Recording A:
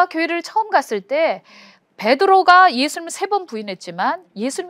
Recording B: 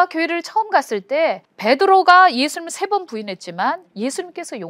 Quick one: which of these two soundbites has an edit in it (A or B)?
B